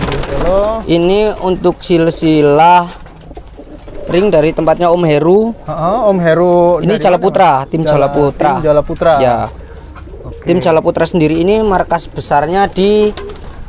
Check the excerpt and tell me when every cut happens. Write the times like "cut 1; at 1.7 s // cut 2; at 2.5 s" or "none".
none

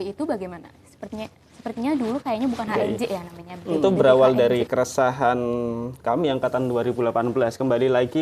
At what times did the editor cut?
cut 1; at 3.8 s

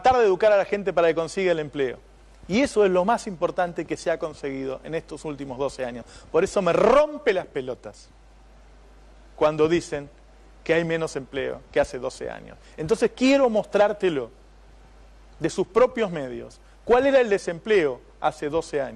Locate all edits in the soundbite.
cut 1; at 13.8 s

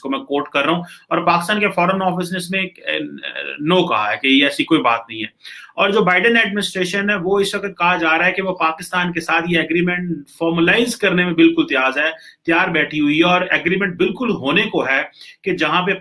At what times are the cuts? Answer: none

